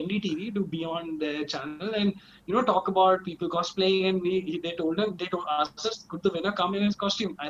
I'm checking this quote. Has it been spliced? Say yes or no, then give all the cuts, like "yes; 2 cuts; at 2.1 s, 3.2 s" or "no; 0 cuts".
no; 0 cuts